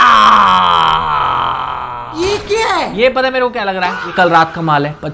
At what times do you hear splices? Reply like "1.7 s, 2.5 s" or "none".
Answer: 2.0 s, 2.9 s